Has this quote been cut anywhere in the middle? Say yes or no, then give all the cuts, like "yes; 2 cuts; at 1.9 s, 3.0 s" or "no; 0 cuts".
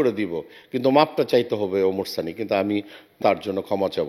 yes; 1 cut; at 3.2 s